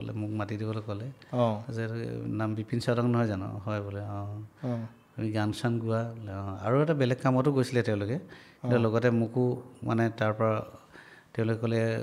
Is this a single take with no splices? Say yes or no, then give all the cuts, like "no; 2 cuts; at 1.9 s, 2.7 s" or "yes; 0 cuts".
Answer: yes; 0 cuts